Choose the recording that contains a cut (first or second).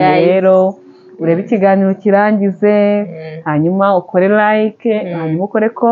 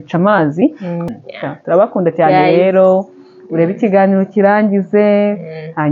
second